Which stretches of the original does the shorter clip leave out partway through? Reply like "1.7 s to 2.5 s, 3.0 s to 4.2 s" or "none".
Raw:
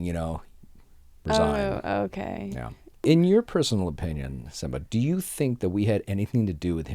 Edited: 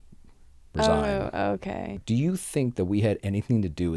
2.5 s to 4.8 s